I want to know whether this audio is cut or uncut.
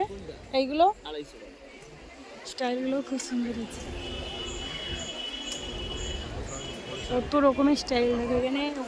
uncut